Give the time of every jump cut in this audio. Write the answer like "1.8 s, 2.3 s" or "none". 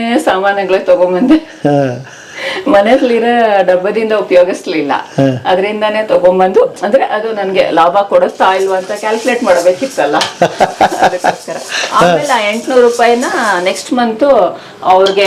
none